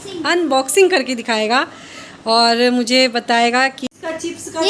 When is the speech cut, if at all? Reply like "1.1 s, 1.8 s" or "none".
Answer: 3.8 s